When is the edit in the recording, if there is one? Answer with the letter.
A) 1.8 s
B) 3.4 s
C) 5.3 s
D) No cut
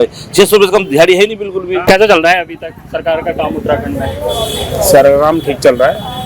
A